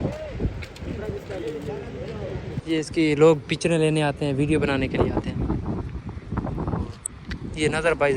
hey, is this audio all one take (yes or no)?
no